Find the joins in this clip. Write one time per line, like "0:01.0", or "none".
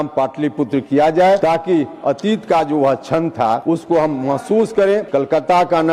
0:01.4
0:03.6
0:05.1